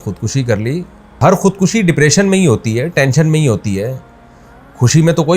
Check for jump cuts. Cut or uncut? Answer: cut